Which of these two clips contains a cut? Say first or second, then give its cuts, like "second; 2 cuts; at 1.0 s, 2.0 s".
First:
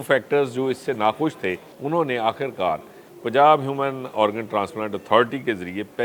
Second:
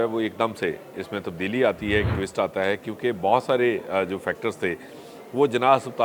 first; 1 cut; at 1.7 s